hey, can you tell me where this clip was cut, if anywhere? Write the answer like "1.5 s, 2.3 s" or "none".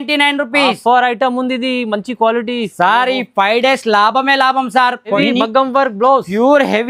5.2 s